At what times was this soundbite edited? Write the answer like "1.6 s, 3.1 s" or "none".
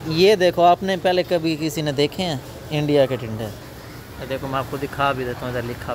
none